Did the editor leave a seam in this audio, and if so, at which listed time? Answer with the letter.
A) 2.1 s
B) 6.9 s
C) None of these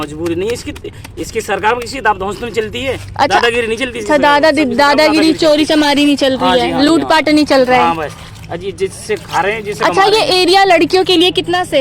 C